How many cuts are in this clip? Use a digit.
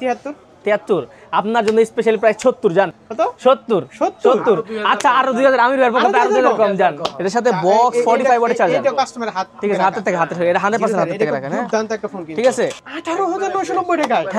3